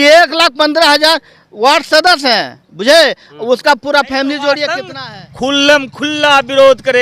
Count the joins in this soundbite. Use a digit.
1